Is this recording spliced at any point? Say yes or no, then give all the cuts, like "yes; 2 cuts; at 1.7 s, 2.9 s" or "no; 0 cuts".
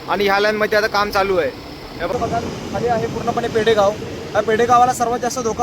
yes; 1 cut; at 2.1 s